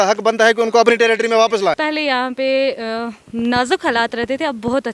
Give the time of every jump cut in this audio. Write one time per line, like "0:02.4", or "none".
0:01.8